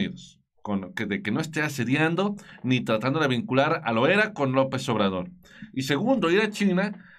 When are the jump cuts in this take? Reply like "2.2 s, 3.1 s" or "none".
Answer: none